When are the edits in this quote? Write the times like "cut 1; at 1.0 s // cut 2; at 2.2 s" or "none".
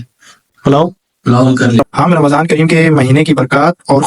cut 1; at 1.8 s